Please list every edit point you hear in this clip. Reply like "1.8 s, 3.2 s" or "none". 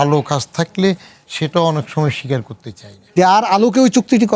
3.1 s